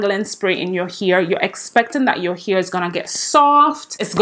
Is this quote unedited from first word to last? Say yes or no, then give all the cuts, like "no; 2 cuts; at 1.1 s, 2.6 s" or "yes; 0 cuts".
yes; 0 cuts